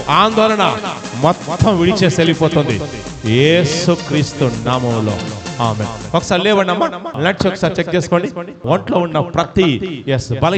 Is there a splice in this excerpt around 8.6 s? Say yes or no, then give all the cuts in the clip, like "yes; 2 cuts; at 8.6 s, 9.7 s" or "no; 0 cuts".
yes; 2 cuts; at 7.1 s, 8.6 s